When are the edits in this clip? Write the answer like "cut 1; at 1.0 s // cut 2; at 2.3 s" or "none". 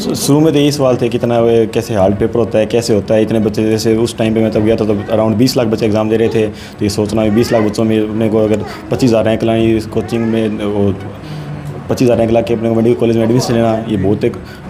none